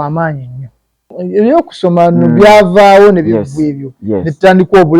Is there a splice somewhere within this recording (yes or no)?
yes